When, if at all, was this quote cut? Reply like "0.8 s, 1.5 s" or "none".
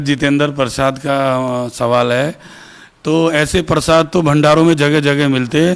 none